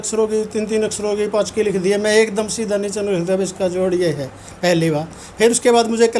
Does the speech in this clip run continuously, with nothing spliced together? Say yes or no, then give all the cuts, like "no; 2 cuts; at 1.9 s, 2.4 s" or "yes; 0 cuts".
yes; 0 cuts